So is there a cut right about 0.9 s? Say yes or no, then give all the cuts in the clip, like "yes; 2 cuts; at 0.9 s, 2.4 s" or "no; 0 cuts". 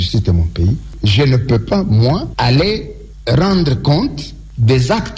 yes; 1 cut; at 0.9 s